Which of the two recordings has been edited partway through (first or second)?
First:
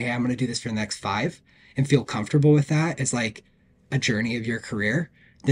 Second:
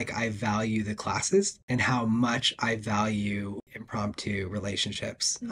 second